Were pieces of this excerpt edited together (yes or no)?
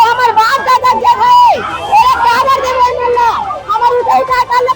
no